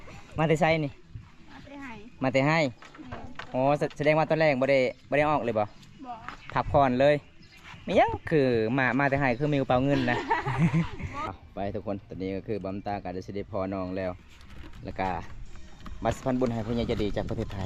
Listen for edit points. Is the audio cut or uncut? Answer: uncut